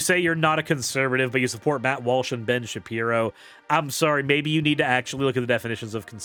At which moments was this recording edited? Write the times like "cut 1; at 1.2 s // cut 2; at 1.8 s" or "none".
none

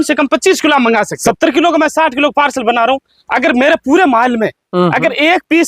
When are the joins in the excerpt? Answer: cut 1; at 1.2 s

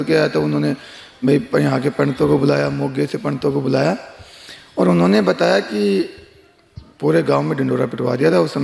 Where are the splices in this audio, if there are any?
none

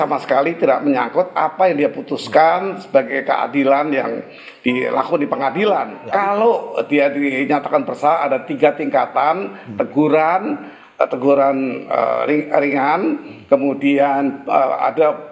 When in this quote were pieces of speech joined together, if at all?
cut 1; at 6.0 s

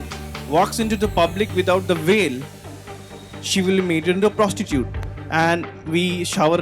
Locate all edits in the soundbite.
cut 1; at 5.0 s

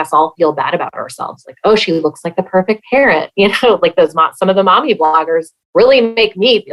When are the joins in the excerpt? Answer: none

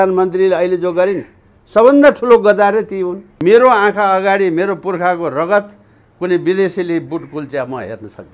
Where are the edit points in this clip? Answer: cut 1; at 3.2 s

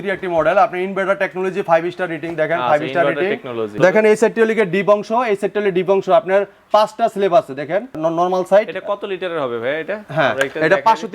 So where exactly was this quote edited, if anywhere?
cut 1; at 3.7 s // cut 2; at 8.0 s

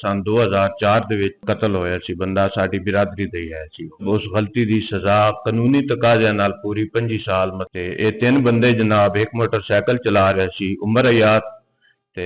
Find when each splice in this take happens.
cut 1; at 1.4 s // cut 2; at 4.0 s // cut 3; at 7.6 s

